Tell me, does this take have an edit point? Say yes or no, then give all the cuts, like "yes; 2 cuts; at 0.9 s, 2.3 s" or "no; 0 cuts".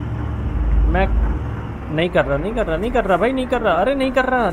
no; 0 cuts